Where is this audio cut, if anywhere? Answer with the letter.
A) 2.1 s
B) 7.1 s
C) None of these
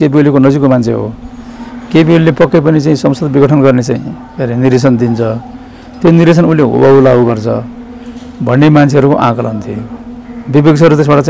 C